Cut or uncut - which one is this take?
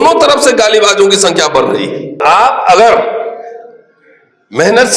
cut